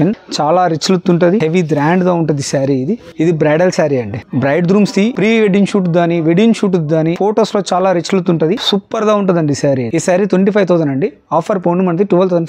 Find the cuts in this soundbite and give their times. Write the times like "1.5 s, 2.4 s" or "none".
none